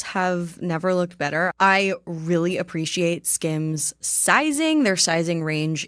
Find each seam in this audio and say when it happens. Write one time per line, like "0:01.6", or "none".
0:01.5